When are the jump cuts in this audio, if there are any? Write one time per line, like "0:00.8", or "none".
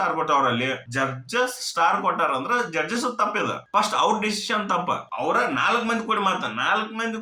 none